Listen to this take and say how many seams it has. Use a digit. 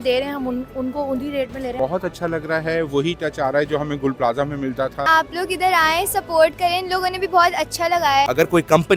3